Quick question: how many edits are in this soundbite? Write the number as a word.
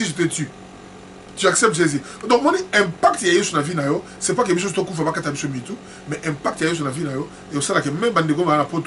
zero